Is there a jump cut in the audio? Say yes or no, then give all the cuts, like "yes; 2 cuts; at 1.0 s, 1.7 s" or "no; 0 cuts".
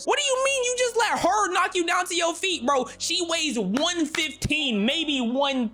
no; 0 cuts